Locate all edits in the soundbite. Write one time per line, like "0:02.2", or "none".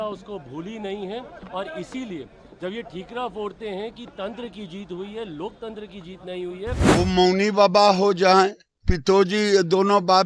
0:06.9